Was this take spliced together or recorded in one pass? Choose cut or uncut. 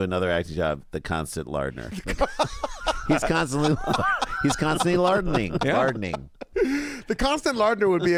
uncut